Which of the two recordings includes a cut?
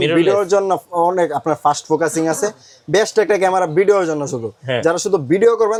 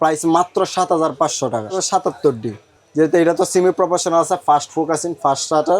second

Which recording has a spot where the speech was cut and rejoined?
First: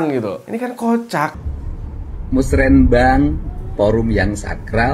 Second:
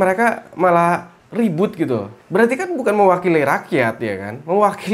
first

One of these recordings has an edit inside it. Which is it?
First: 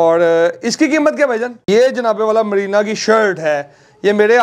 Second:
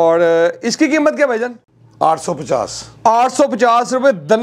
first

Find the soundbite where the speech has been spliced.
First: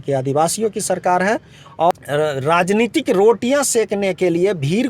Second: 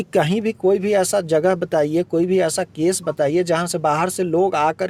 first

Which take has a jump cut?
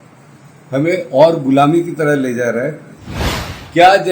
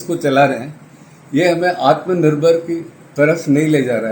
first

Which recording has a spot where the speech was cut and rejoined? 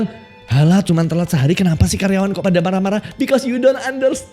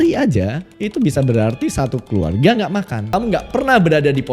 second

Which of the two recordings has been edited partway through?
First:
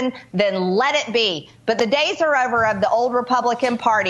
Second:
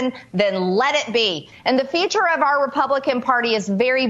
second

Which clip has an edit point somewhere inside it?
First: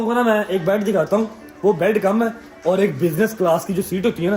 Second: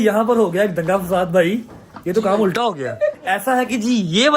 second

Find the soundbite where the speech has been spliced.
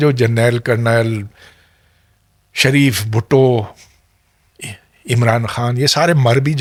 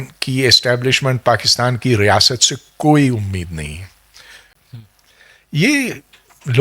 second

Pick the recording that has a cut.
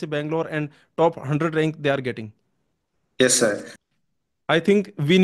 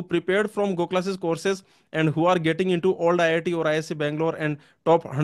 first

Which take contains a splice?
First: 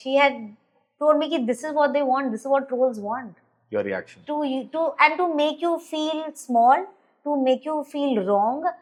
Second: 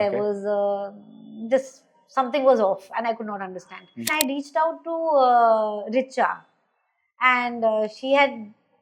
second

